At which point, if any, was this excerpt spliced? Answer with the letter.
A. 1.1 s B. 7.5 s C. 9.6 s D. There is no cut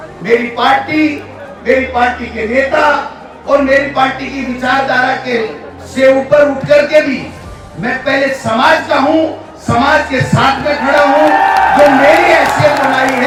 D